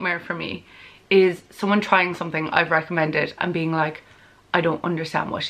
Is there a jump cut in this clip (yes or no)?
no